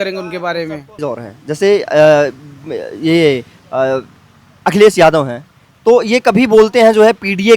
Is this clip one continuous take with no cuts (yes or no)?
yes